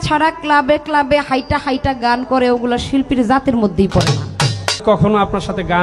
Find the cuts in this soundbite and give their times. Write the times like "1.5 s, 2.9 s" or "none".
4.8 s